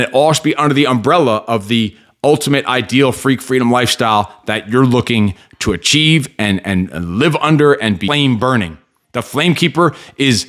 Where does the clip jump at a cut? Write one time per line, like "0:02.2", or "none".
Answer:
0:08.1